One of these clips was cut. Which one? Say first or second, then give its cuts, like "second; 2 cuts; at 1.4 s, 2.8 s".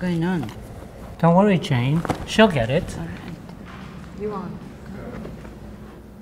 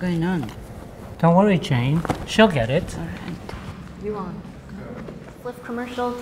second; 2 cuts; at 3.5 s, 5.3 s